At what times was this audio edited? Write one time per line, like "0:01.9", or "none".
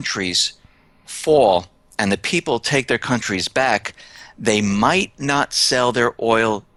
none